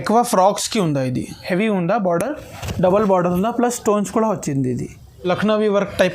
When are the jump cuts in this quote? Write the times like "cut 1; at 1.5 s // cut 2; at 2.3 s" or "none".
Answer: cut 1; at 1.3 s // cut 2; at 5.1 s